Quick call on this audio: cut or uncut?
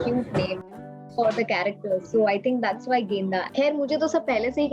cut